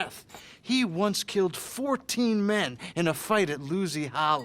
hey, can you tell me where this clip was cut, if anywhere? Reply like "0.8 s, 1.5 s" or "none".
none